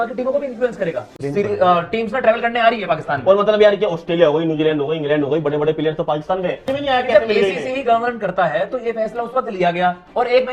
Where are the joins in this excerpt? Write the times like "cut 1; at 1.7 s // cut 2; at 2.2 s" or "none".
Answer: cut 1; at 1.3 s